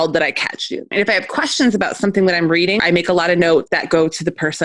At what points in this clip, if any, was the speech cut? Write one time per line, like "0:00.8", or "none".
0:00.9
0:02.8
0:03.7